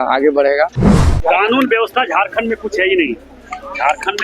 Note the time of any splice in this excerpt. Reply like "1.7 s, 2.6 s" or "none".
1.1 s